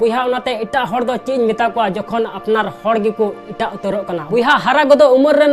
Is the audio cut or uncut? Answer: cut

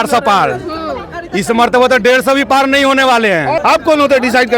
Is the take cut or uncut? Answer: cut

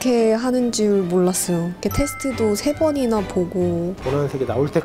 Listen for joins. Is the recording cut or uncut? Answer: cut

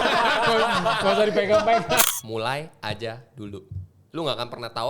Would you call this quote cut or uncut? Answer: cut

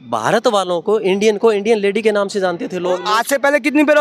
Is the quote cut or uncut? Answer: cut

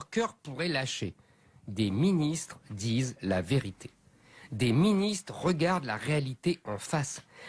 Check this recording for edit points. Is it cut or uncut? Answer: cut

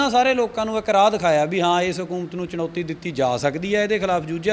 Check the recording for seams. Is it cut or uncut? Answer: uncut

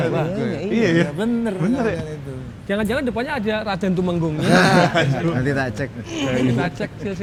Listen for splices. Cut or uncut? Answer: uncut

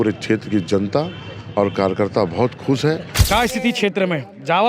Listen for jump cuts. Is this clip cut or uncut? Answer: cut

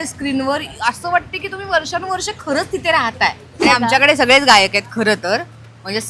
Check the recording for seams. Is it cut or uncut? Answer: cut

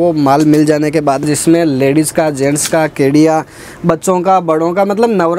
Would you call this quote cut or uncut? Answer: cut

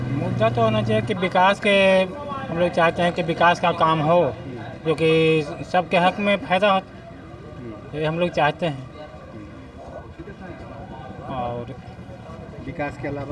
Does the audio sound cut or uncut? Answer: uncut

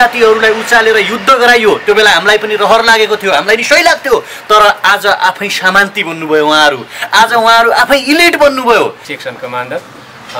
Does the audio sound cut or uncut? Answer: cut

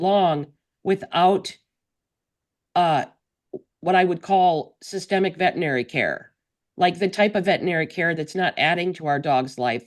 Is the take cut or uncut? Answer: uncut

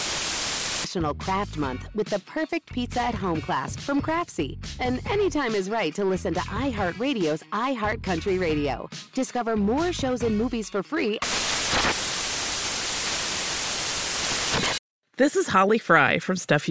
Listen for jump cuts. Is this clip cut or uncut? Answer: cut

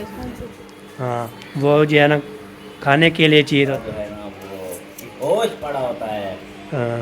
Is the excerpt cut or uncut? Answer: cut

